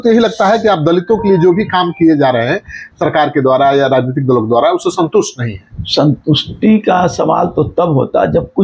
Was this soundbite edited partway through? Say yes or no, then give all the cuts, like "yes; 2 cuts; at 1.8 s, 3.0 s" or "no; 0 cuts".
yes; 1 cut; at 5.7 s